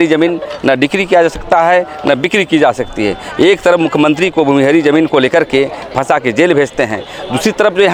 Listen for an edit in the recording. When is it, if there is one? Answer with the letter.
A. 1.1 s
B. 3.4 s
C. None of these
C